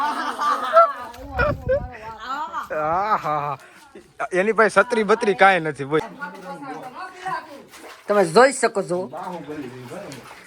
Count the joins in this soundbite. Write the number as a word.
one